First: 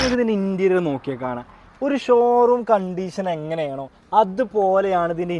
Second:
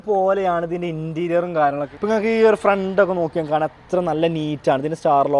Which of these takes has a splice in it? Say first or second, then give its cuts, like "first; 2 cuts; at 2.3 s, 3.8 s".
second; 1 cut; at 1.8 s